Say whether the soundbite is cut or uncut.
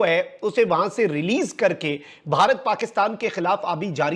uncut